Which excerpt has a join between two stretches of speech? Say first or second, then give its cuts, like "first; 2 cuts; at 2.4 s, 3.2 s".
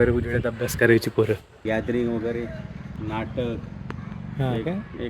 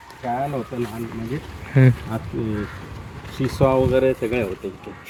first; 1 cut; at 1.5 s